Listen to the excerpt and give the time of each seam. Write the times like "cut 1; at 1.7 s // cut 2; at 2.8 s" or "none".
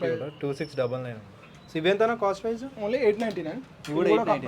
none